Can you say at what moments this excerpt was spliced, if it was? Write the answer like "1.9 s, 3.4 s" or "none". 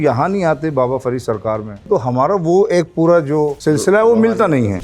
1.8 s, 3.6 s